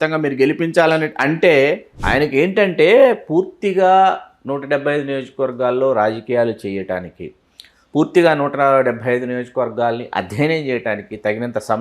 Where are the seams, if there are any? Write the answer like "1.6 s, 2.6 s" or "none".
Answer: 1.9 s